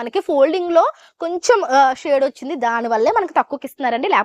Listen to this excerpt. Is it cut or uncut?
uncut